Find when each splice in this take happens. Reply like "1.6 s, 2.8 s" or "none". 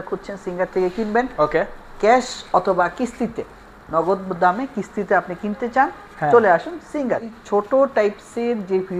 7.3 s